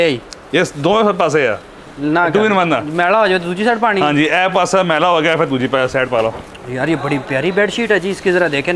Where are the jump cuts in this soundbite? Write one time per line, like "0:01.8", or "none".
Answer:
0:06.4